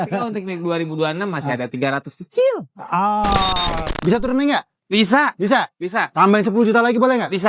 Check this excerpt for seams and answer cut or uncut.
cut